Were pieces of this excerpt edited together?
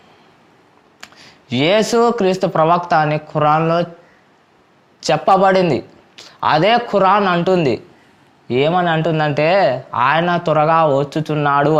no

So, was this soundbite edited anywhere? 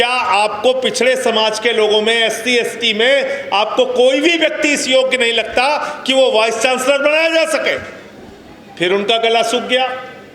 no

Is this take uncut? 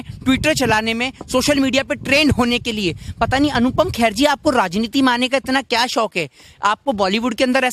yes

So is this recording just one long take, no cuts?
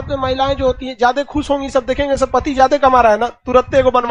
yes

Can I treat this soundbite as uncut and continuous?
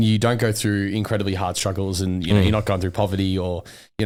yes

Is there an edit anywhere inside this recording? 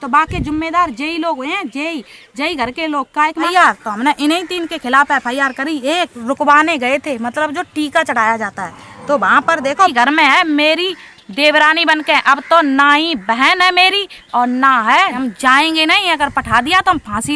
yes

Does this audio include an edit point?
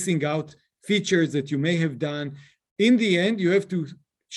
no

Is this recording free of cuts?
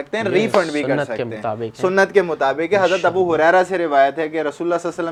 yes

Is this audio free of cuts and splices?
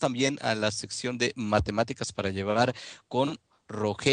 no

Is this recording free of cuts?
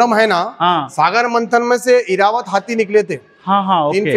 yes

